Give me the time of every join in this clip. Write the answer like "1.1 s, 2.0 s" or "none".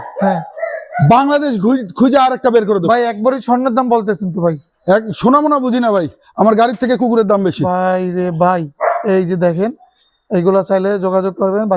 none